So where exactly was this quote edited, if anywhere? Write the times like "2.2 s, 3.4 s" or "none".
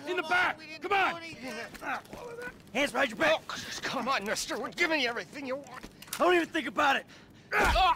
1.4 s